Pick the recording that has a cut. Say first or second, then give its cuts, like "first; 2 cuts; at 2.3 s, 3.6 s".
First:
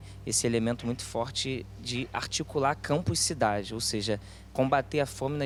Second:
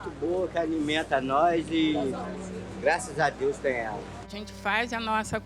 second; 1 cut; at 4.3 s